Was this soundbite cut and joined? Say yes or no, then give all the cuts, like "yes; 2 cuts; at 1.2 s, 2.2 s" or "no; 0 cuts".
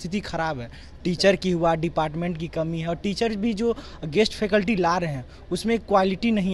no; 0 cuts